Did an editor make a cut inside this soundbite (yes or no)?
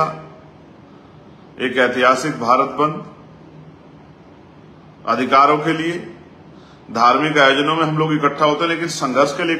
no